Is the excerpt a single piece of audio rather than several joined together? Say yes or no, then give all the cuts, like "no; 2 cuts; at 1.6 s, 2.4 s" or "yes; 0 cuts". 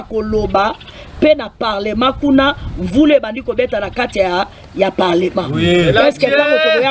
yes; 0 cuts